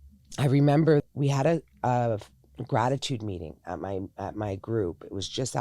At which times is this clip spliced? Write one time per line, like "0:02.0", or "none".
0:01.1